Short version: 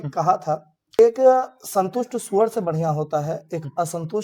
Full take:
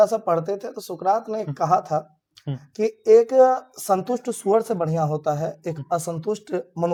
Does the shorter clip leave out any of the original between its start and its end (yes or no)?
yes